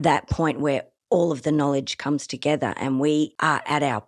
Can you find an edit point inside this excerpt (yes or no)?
no